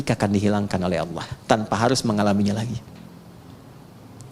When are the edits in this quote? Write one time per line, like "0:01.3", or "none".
none